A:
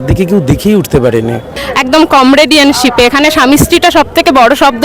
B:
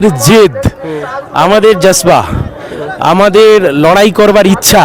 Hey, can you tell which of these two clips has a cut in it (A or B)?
A